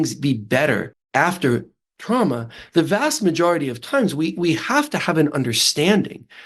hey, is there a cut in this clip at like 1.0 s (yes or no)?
yes